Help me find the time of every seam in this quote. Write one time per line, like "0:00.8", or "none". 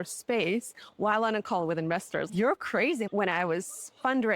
0:02.3
0:03.1